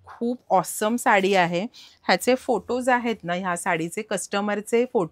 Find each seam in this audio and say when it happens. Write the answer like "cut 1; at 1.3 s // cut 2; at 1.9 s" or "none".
none